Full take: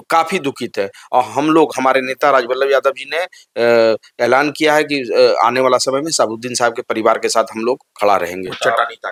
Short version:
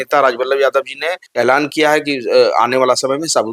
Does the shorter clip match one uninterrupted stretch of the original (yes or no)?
no